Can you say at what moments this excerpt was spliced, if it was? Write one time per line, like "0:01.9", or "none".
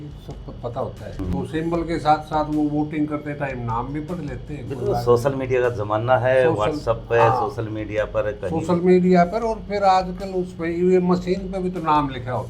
0:01.1